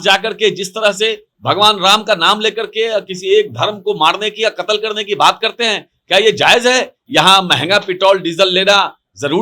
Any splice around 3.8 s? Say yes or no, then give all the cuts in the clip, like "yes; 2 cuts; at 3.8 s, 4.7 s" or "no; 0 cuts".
no; 1 cut; at 7.0 s